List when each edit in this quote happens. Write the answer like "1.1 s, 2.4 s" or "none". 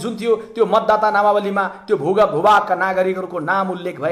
none